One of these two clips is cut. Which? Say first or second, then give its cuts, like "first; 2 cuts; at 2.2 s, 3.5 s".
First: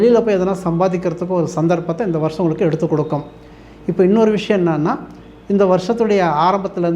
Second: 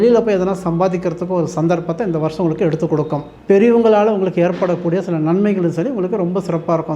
second; 1 cut; at 3.3 s